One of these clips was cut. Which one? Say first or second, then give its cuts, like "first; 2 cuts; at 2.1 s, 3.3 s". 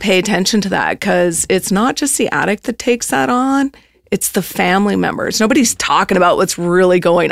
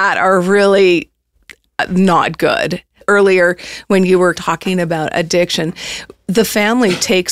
second; 2 cuts; at 3.0 s, 4.4 s